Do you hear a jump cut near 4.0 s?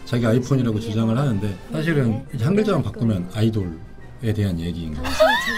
no; 1 cut; at 1.6 s

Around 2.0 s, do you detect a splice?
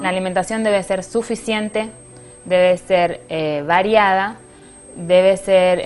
yes; 1 cut; at 2.0 s

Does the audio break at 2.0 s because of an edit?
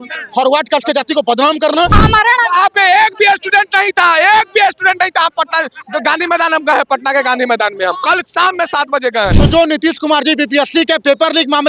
yes; 2 cuts; at 2.0 s, 9.4 s

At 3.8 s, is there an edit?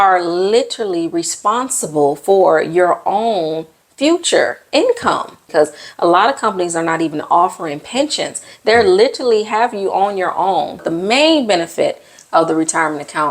no; 2 cuts; at 5.4 s, 10.8 s

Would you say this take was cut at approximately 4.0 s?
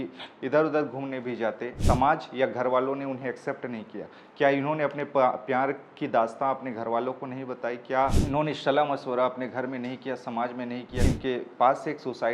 no; 3 cuts; at 1.7 s, 8.2 s, 11.0 s

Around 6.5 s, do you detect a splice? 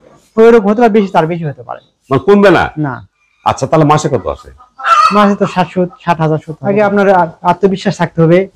yes; 1 cut; at 6.5 s

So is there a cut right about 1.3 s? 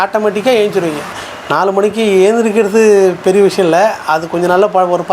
yes; 1 cut; at 1.3 s

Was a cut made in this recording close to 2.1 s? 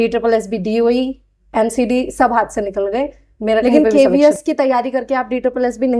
no; 1 cut; at 3.6 s

